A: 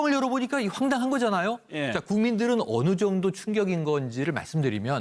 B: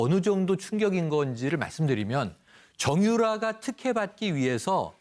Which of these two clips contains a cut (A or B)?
A